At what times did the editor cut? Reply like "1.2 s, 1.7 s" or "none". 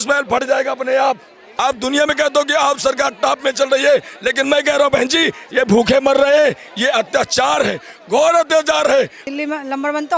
1.4 s, 9.2 s

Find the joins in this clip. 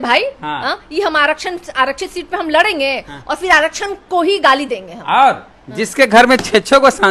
none

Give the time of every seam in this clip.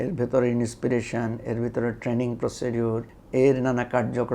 3.1 s

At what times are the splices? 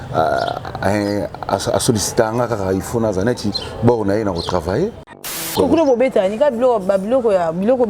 5.5 s

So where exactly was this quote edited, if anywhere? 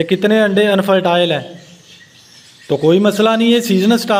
none

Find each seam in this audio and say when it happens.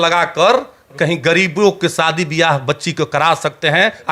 none

